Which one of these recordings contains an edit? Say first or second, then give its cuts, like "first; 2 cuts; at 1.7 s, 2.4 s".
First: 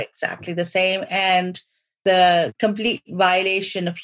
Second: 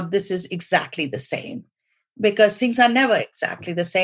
first; 2 cuts; at 2.0 s, 2.5 s